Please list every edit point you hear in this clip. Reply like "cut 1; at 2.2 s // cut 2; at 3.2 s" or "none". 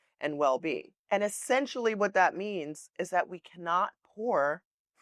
cut 1; at 0.9 s